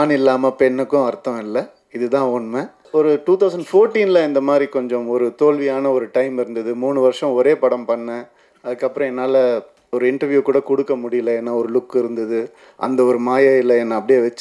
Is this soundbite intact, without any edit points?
no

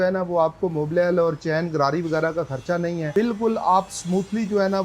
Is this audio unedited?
no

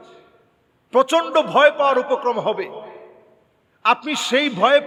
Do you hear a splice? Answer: no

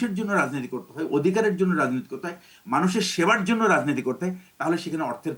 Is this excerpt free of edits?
yes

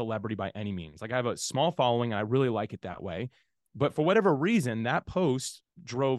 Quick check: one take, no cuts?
yes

